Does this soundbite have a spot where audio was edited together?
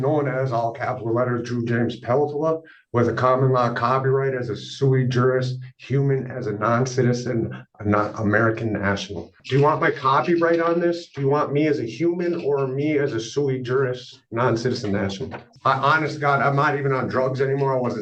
yes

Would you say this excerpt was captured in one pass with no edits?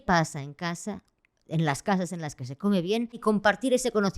no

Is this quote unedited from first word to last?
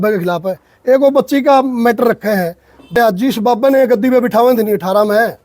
no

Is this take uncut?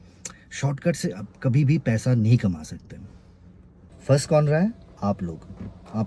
no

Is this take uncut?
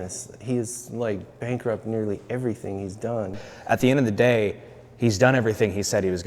no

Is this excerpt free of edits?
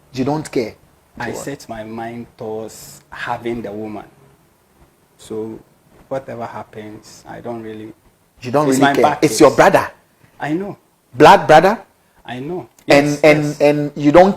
no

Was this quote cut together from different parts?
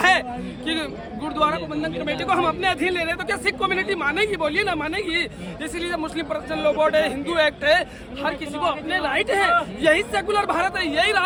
no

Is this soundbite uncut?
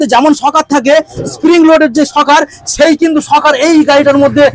yes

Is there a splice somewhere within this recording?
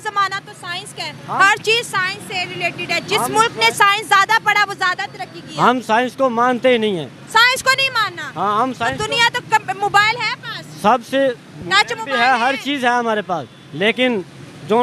no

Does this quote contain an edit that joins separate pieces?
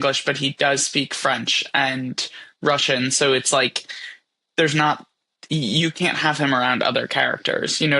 no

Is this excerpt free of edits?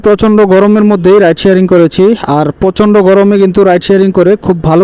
yes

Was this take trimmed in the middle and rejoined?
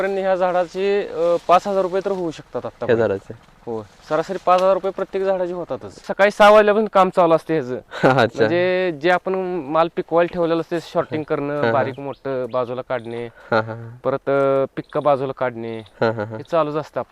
yes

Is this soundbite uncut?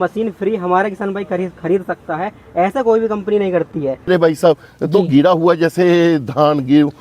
no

